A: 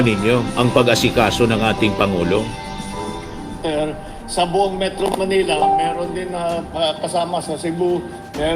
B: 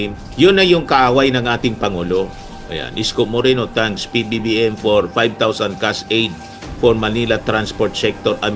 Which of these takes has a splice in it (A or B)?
A